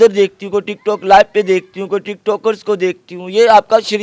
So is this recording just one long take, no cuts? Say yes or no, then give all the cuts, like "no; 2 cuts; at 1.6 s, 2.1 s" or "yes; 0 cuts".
yes; 0 cuts